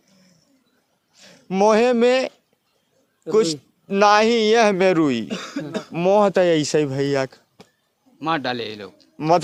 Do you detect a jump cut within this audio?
no; 0 cuts

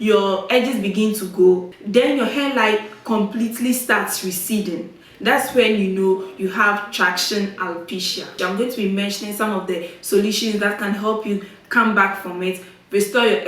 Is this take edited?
yes; 2 cuts; at 1.7 s, 8.3 s

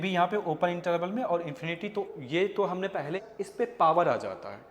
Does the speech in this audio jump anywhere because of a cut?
yes; 2 cuts; at 2.1 s, 3.2 s

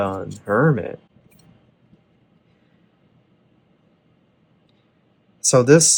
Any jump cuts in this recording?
no; 0 cuts

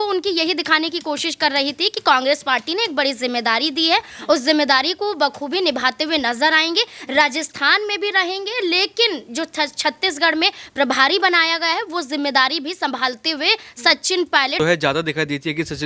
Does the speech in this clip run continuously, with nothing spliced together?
no; 1 cut; at 14.6 s

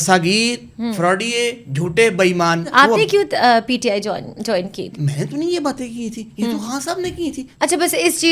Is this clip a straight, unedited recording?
no; 3 cuts; at 2.7 s, 4.9 s, 7.4 s

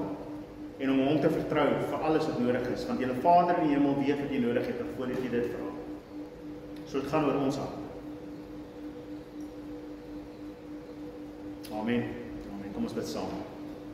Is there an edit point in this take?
no; 0 cuts

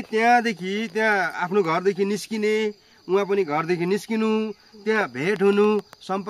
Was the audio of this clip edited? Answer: no; 0 cuts

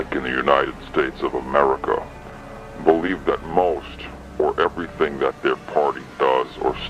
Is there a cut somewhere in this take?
yes; 1 cut; at 4.8 s

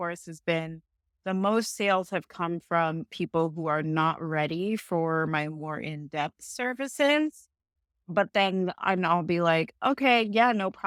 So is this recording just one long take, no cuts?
yes; 0 cuts

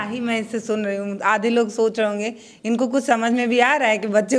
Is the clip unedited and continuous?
yes; 0 cuts

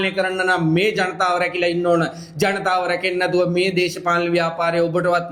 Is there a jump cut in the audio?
no; 0 cuts

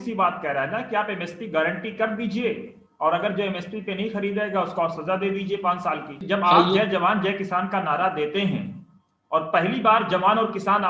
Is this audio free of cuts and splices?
yes; 0 cuts

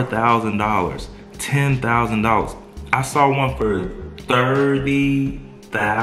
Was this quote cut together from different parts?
no; 0 cuts

